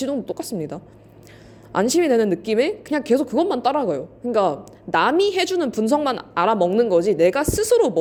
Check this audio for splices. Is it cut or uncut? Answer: uncut